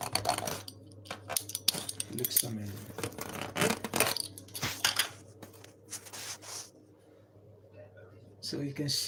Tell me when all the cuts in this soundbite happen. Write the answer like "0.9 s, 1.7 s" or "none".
none